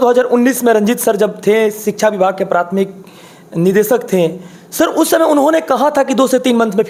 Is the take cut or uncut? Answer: uncut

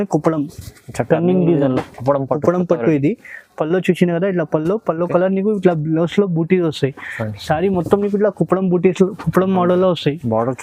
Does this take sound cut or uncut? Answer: uncut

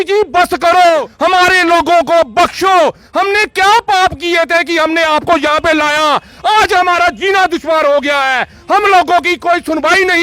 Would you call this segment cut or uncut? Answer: cut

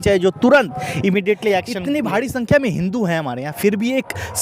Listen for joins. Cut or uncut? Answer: cut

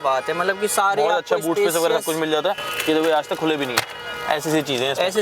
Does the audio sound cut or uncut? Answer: uncut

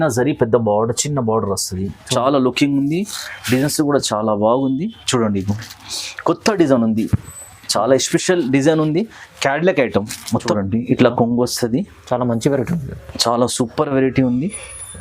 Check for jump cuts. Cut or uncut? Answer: cut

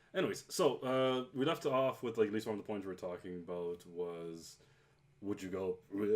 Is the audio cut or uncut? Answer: cut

